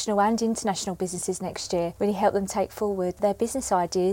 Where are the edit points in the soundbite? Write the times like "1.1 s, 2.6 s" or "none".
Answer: 1.9 s, 3.2 s